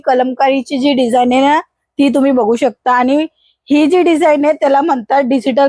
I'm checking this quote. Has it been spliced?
no; 0 cuts

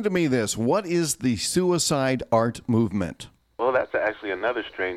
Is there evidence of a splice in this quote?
yes; 1 cut; at 3.6 s

